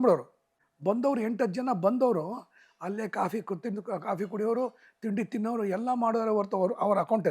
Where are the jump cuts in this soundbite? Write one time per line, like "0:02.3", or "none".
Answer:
none